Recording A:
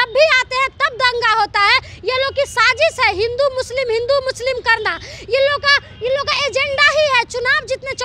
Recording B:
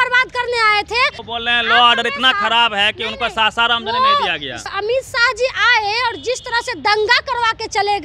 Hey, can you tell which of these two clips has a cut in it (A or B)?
B